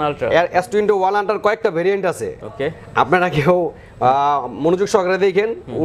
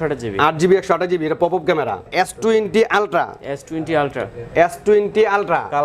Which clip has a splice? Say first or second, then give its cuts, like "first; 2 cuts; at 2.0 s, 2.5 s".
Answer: second; 1 cut; at 2.0 s